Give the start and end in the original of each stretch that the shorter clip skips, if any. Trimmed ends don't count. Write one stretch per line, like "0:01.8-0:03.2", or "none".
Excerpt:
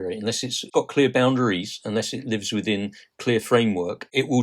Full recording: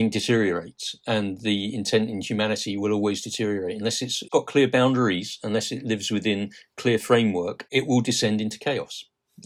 none